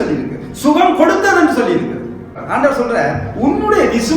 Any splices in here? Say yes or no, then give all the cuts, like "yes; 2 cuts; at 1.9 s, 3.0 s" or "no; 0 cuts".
yes; 1 cut; at 2.4 s